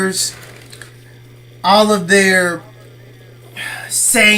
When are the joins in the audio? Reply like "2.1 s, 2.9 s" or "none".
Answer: 1.1 s